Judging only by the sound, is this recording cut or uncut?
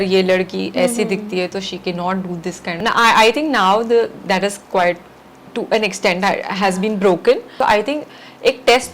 cut